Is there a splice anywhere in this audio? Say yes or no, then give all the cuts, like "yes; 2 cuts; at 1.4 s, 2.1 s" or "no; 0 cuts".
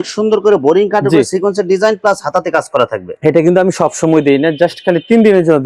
no; 0 cuts